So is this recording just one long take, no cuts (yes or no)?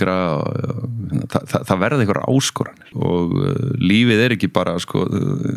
no